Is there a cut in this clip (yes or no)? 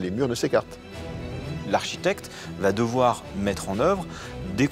yes